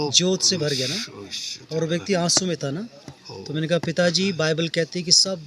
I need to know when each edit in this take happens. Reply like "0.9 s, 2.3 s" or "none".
none